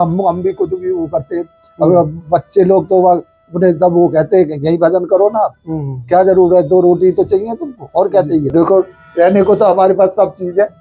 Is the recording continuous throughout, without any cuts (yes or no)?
no